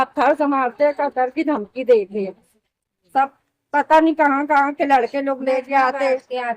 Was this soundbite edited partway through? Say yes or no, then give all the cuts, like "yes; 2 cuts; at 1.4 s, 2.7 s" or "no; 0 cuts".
no; 0 cuts